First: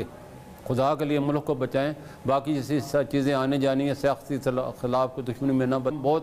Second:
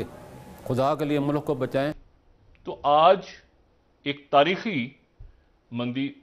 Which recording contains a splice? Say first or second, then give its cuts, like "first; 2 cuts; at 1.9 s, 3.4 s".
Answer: second; 1 cut; at 2.1 s